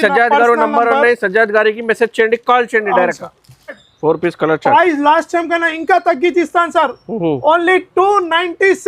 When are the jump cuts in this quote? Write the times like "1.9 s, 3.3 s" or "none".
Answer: 3.7 s